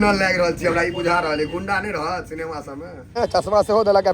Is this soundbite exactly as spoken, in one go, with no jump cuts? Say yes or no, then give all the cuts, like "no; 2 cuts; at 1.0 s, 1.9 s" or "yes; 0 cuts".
no; 1 cut; at 3.0 s